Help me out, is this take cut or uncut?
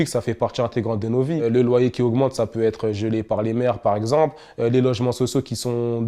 cut